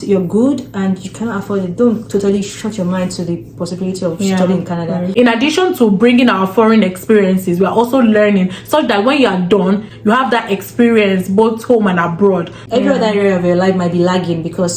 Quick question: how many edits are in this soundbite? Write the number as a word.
three